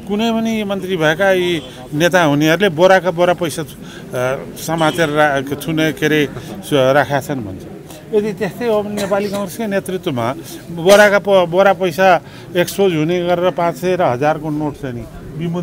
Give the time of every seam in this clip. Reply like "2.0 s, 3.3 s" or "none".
none